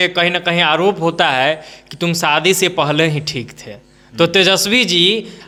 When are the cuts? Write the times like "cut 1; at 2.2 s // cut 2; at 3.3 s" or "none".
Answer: none